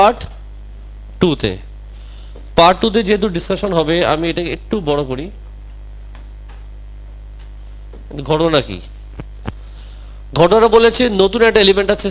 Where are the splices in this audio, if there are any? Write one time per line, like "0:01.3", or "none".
none